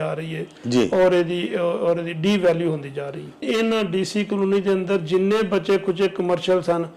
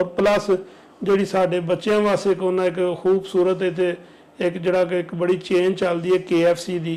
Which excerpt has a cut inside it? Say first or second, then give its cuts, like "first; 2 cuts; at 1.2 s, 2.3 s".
first; 1 cut; at 3.4 s